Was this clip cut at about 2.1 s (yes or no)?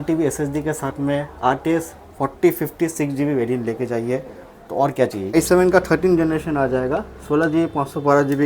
no